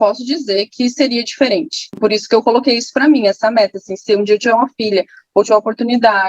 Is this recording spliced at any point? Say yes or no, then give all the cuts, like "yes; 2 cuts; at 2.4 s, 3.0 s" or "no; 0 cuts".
no; 0 cuts